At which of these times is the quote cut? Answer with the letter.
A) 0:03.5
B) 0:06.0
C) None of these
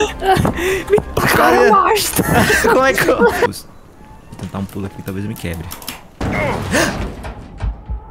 A